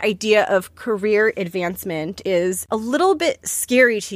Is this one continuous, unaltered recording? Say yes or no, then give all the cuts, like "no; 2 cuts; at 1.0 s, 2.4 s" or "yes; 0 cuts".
no; 1 cut; at 2.2 s